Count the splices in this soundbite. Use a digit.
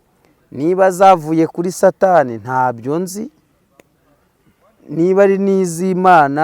0